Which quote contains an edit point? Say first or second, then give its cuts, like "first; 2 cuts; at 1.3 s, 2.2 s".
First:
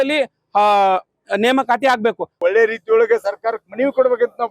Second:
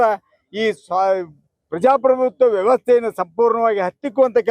first; 1 cut; at 2.4 s